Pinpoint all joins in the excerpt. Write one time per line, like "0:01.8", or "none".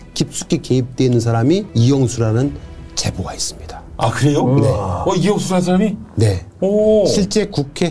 0:01.7